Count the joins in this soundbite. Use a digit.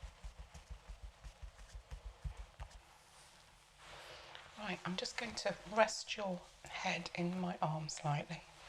1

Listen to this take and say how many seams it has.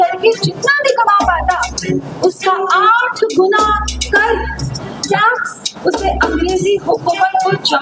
0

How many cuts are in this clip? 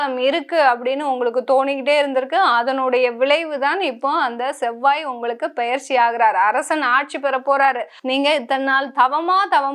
1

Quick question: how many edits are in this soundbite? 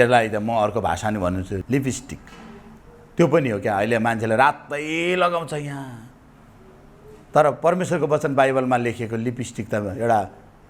1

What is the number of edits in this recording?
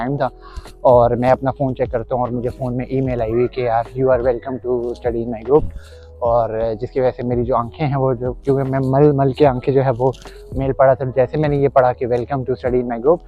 0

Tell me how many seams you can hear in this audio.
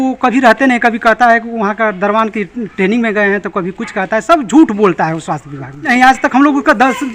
1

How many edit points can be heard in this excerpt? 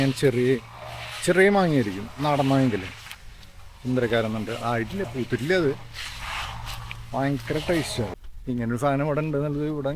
1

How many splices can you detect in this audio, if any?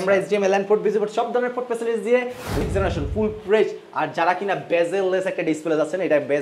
1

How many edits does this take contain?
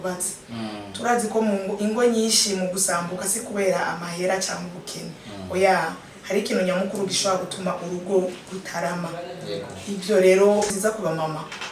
1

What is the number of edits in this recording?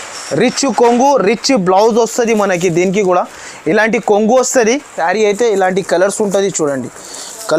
1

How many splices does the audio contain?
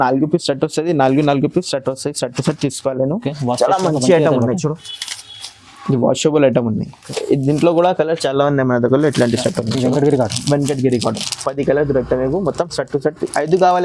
1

